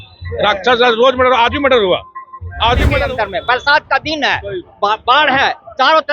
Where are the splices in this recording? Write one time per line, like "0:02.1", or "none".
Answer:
0:02.9